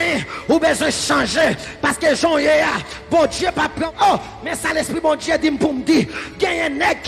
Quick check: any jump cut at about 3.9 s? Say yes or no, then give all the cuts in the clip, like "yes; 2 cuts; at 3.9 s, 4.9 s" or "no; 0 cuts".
yes; 1 cut; at 3.9 s